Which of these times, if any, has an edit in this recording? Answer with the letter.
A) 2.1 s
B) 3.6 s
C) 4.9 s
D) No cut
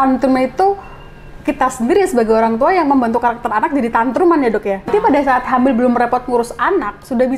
C